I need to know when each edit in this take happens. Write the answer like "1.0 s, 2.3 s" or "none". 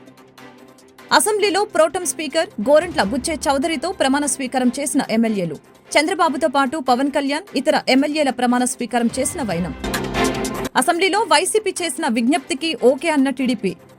1.1 s